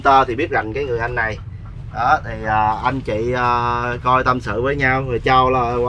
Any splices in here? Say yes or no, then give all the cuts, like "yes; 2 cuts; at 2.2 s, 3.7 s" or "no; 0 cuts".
no; 0 cuts